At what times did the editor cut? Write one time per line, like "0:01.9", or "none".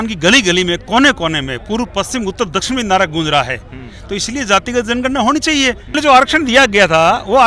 0:05.9